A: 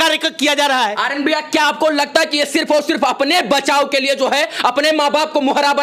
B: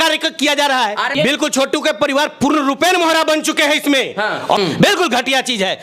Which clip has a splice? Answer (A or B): B